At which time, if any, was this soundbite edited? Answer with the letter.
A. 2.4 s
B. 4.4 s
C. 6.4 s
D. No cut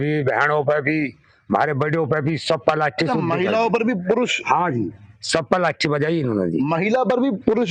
D